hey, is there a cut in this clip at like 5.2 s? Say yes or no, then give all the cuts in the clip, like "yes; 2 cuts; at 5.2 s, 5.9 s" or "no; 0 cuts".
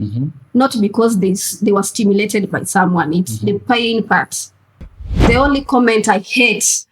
yes; 1 cut; at 5.2 s